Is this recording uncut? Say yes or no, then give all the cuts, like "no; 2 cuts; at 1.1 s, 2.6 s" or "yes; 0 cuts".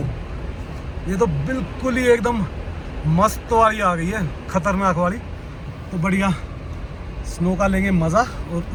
yes; 0 cuts